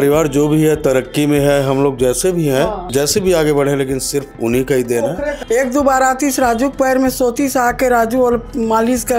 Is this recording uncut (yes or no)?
no